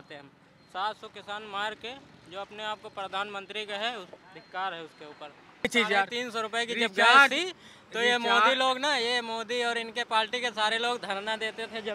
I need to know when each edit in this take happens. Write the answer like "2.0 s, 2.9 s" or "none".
5.7 s